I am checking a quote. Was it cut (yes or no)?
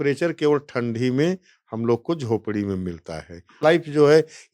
yes